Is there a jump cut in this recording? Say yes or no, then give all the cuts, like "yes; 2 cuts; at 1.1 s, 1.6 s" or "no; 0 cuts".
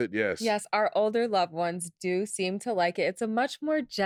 no; 0 cuts